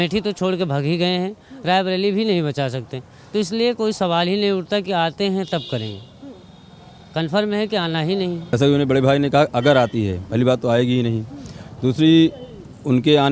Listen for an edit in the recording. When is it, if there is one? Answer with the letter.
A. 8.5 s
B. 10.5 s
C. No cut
A